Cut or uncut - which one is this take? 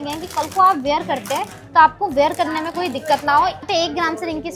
cut